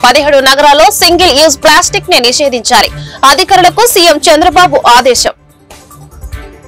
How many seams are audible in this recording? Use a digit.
1